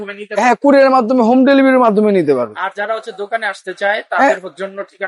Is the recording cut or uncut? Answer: uncut